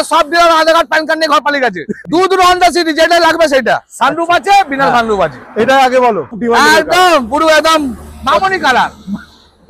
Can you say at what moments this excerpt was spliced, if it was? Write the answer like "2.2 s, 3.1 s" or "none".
2.0 s, 6.1 s